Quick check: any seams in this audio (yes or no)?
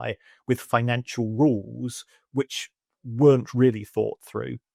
no